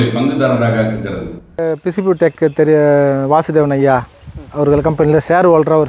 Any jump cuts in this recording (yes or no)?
yes